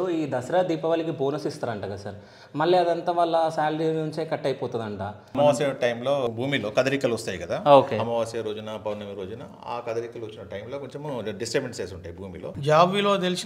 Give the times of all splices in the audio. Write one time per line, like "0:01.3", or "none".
0:05.3
0:06.3
0:12.5